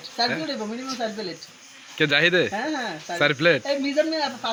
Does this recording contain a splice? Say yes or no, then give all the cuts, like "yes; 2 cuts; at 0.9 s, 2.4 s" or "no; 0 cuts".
no; 0 cuts